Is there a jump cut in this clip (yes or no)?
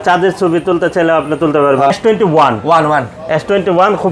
yes